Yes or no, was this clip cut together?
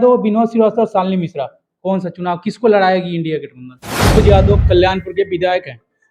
yes